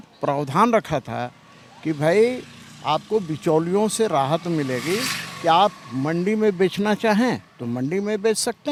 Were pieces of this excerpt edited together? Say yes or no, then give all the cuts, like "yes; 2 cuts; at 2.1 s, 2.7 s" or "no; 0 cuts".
no; 0 cuts